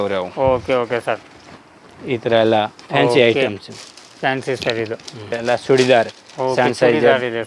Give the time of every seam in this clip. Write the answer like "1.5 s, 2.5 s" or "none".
5.4 s